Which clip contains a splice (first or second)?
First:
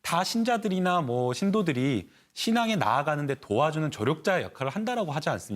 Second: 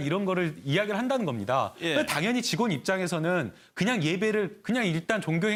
first